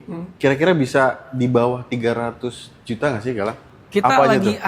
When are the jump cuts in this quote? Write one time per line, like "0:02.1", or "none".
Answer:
0:03.6